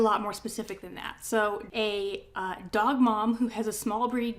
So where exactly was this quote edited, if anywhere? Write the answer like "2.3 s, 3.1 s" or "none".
1.6 s